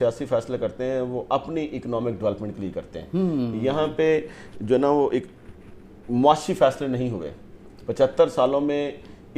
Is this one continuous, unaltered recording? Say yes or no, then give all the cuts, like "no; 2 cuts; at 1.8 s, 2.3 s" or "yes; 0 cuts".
yes; 0 cuts